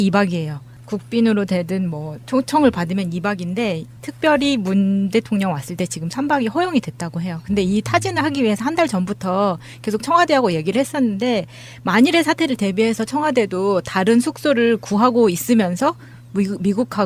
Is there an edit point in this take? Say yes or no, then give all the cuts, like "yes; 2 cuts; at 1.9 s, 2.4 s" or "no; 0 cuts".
no; 0 cuts